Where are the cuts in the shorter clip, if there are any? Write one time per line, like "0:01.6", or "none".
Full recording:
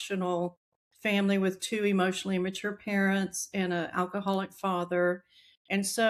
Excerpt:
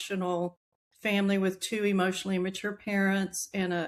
none